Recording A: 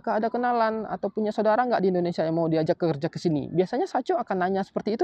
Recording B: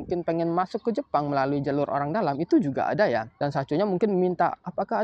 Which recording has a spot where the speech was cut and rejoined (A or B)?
B